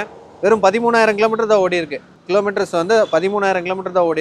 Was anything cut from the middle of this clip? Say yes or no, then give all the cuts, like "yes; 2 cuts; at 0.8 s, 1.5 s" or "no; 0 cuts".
no; 0 cuts